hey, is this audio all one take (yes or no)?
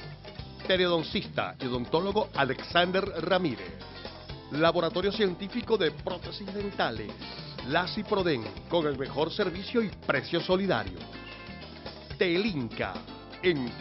yes